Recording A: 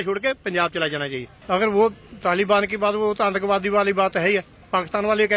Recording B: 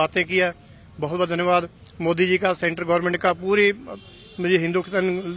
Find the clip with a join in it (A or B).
A